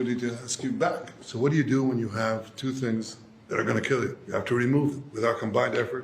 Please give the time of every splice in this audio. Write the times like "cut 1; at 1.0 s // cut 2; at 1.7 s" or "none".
cut 1; at 1.2 s // cut 2; at 4.2 s // cut 3; at 5.1 s